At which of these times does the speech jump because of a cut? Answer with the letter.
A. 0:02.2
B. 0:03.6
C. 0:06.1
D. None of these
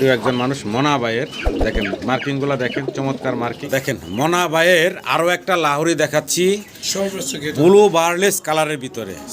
B